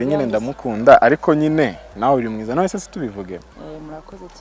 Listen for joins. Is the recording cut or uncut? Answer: uncut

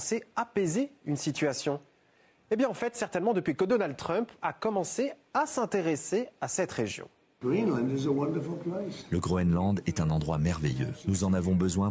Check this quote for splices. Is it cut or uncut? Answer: uncut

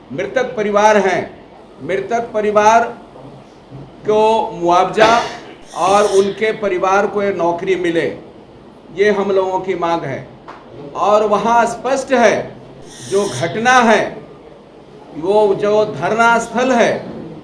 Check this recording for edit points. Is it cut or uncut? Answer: uncut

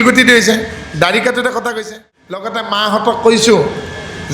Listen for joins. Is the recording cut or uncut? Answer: cut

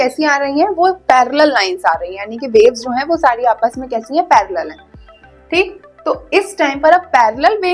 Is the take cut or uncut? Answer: uncut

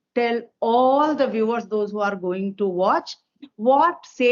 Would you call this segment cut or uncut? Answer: uncut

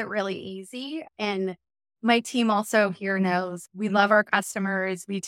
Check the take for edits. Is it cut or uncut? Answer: cut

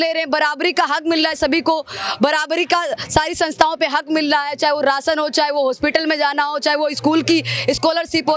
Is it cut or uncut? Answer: uncut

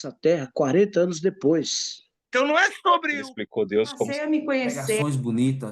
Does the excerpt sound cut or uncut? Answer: cut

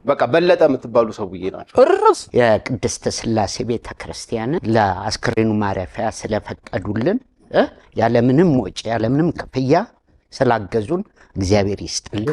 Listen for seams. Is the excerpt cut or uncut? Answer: cut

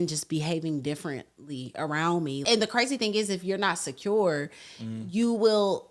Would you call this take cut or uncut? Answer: cut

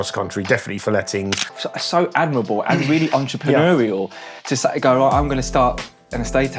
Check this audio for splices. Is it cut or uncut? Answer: cut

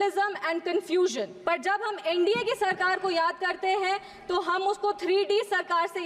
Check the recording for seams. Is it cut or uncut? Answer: cut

